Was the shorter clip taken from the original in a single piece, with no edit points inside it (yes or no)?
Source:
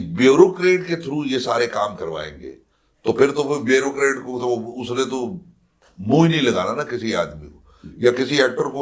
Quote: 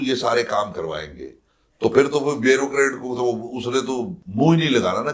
no